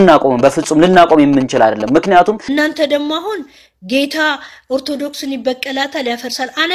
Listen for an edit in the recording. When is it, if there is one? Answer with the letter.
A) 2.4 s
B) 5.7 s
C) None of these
A